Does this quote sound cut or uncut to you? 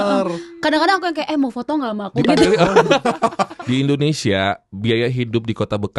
cut